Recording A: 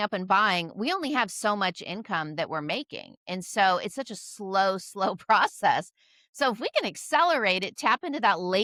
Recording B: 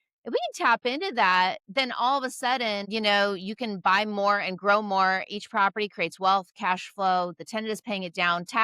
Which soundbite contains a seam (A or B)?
B